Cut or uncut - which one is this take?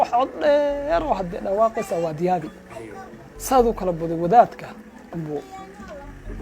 cut